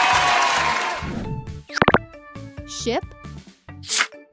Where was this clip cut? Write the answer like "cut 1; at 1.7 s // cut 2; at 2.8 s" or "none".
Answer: none